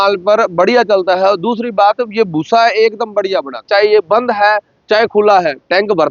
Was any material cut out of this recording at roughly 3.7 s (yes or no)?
yes